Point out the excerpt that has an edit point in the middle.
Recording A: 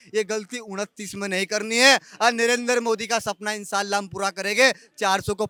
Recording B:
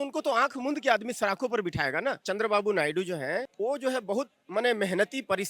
B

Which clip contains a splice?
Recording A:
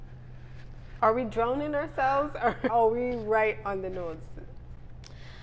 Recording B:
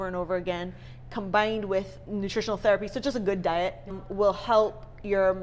A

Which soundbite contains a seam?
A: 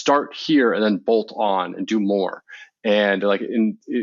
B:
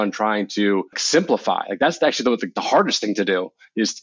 B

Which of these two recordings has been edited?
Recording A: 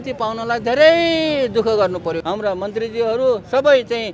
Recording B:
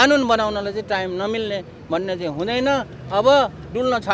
A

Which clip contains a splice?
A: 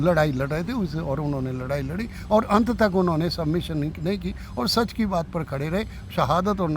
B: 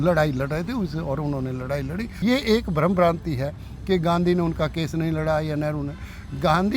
B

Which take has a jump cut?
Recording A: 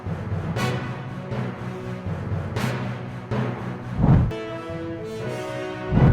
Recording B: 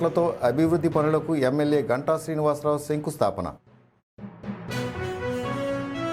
A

